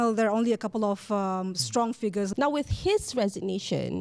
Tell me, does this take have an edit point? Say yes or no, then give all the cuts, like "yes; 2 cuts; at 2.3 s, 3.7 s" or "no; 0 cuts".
yes; 1 cut; at 2.3 s